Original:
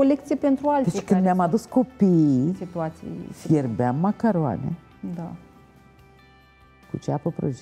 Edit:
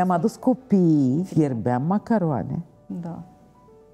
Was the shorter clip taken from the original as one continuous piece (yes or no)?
no